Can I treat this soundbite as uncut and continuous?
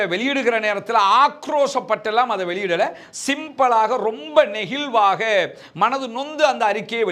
yes; 0 cuts

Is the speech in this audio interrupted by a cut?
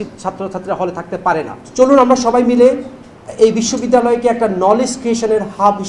yes; 1 cut; at 1.6 s

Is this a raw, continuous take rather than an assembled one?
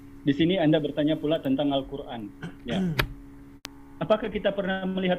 no; 1 cut; at 3.5 s

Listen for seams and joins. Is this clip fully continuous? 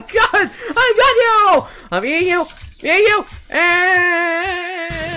yes; 0 cuts

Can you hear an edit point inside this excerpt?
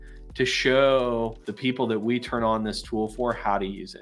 no; 0 cuts

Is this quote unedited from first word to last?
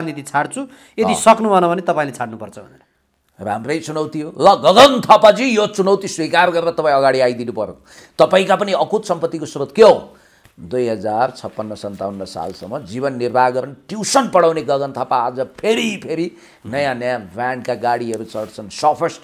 yes; 0 cuts

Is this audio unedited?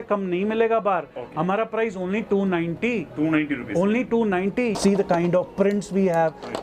no; 1 cut; at 4.7 s

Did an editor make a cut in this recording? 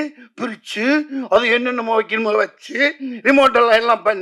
no; 0 cuts

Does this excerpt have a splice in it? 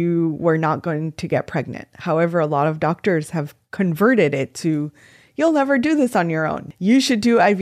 yes; 1 cut; at 6.6 s

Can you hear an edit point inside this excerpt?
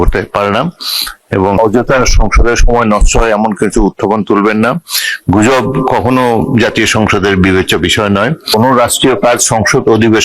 yes; 2 cuts; at 1.6 s, 8.5 s

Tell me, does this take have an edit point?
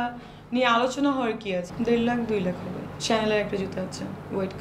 yes; 1 cut; at 1.7 s

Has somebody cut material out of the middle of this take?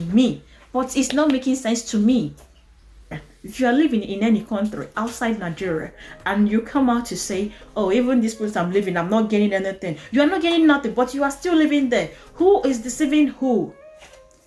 no; 0 cuts

